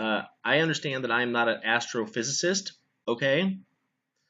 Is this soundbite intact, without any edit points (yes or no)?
no